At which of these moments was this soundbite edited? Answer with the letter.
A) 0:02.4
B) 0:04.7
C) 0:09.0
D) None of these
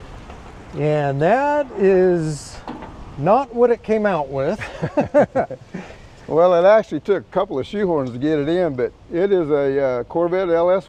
D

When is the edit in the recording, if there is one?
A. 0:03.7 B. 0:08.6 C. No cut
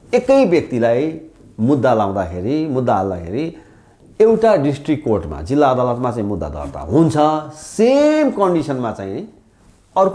C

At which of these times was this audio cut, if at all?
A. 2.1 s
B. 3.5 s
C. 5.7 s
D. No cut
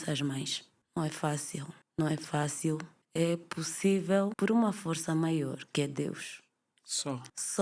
D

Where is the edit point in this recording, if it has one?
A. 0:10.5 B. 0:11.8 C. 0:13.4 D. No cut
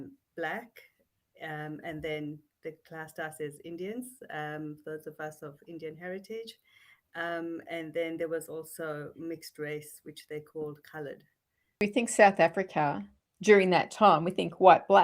B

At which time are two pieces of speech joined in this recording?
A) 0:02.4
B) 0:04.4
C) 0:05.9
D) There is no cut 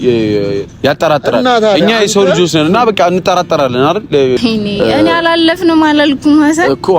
B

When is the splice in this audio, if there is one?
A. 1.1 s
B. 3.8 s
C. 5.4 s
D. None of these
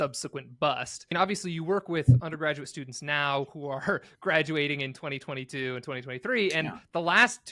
A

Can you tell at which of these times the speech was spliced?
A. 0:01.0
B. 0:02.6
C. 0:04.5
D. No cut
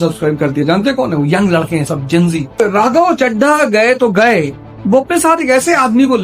B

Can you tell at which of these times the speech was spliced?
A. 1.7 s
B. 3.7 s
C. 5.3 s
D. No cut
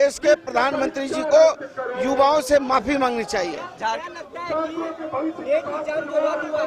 D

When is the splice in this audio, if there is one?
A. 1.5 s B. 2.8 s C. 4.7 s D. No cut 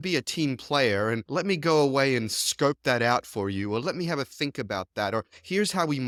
D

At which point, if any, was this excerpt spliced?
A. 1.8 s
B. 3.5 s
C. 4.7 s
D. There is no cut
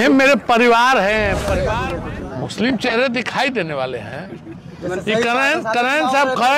A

